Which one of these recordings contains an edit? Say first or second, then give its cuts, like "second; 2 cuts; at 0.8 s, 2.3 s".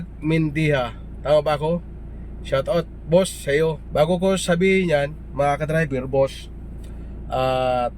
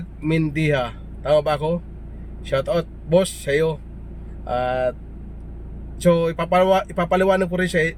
first; 1 cut; at 3.8 s